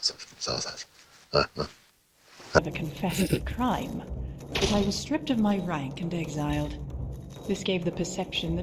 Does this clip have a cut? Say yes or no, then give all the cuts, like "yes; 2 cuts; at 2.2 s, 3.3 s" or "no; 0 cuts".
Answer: yes; 1 cut; at 2.6 s